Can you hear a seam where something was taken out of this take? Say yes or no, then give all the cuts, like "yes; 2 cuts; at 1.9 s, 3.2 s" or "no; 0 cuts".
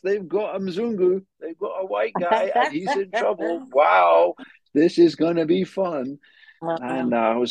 no; 0 cuts